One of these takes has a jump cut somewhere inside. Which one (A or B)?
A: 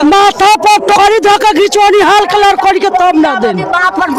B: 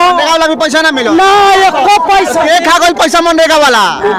A